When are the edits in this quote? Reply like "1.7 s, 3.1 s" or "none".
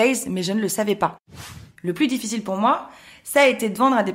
1.5 s

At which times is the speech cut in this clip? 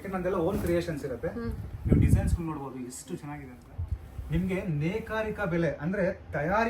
3.6 s

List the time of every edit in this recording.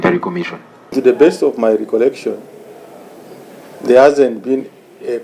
0.9 s

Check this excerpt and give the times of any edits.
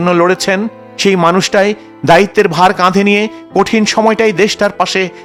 none

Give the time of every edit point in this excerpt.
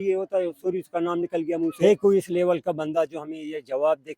1.7 s

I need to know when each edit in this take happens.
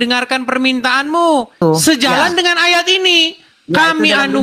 1.6 s

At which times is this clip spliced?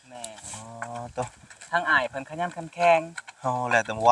none

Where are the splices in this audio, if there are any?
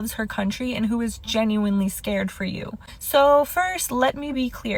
none

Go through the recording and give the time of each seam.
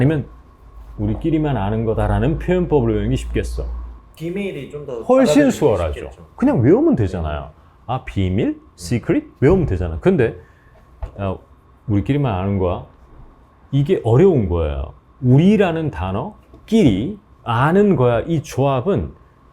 4.2 s

